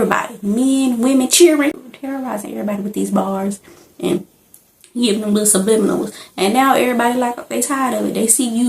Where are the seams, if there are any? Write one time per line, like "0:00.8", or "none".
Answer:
0:01.8